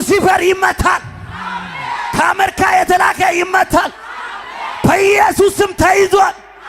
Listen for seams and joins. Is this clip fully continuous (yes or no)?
yes